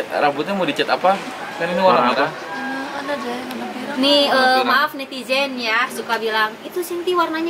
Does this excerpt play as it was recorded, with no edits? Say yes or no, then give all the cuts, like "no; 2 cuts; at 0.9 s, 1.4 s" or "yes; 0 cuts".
yes; 0 cuts